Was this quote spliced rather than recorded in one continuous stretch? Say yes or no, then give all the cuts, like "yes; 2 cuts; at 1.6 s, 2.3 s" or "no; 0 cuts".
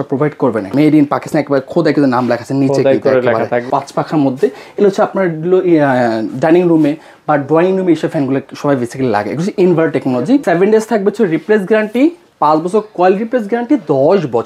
yes; 3 cuts; at 0.7 s, 3.6 s, 10.4 s